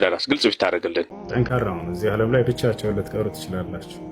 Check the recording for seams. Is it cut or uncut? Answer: cut